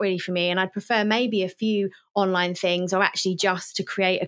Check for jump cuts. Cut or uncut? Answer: uncut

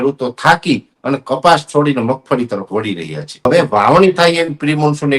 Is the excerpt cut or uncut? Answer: cut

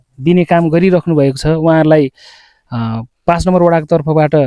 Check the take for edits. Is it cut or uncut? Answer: uncut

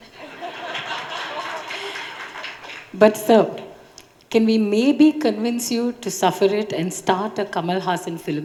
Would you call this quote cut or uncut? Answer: uncut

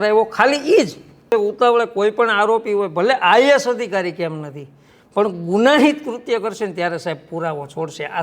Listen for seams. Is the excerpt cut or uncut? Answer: cut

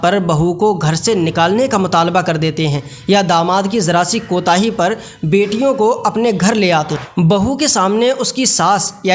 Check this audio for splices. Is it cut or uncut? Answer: cut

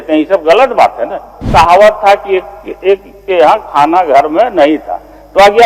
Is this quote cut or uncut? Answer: cut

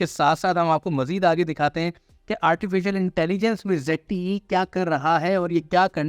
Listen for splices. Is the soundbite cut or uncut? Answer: uncut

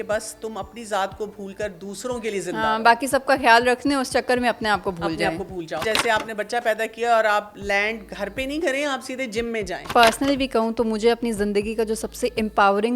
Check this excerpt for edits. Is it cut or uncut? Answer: cut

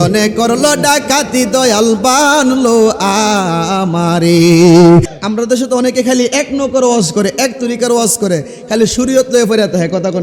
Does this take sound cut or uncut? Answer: cut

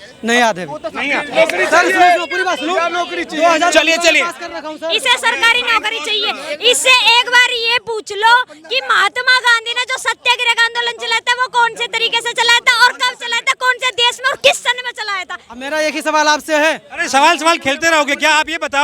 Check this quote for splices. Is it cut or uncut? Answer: uncut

